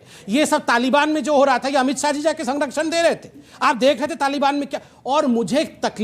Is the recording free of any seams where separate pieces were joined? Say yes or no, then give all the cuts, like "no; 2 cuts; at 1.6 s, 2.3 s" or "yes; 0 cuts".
yes; 0 cuts